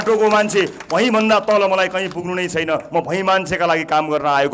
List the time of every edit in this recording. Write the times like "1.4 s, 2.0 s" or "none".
none

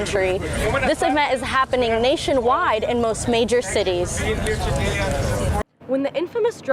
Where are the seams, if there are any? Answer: 5.6 s

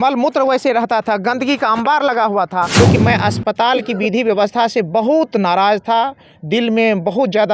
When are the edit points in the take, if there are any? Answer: 2.7 s

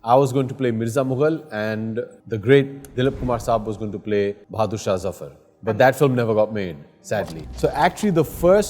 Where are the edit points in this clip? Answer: 2.2 s, 4.4 s, 7.4 s

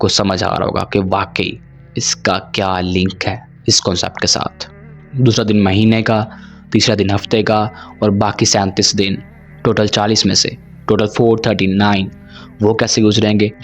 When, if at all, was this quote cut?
none

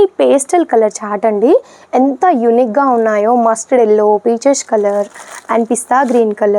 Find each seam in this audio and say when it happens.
none

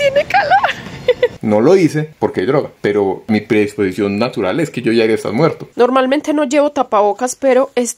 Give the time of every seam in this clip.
1.4 s, 3.2 s, 5.6 s

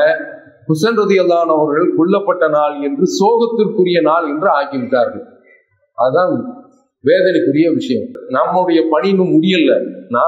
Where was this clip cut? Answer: 8.1 s

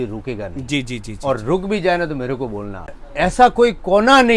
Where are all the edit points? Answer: 3.0 s

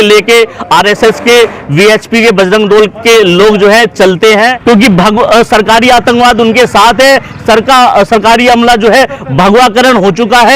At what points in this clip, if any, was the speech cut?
4.5 s

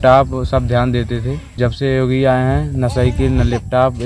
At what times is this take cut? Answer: 1.6 s

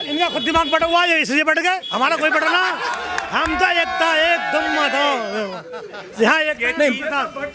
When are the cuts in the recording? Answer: none

